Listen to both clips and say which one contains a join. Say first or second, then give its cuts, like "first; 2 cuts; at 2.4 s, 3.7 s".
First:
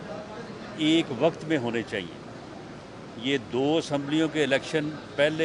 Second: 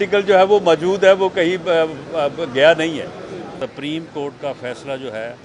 second; 1 cut; at 3.5 s